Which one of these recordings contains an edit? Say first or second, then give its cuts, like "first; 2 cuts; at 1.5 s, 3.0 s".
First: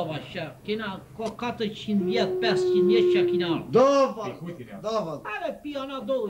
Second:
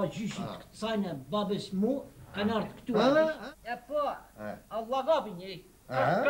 second; 1 cut; at 3.4 s